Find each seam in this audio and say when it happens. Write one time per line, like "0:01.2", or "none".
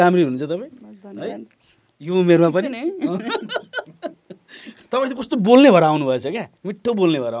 0:04.8